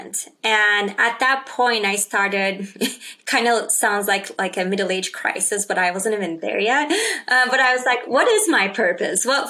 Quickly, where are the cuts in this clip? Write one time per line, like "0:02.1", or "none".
none